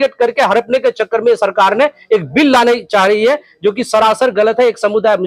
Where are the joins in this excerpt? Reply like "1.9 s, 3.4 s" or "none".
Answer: none